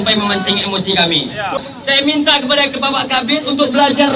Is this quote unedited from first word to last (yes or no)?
no